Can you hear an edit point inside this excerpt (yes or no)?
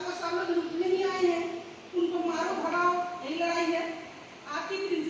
no